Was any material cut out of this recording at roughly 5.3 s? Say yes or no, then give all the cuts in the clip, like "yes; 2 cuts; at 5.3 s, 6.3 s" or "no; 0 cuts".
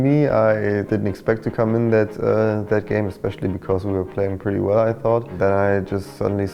yes; 2 cuts; at 0.8 s, 5.3 s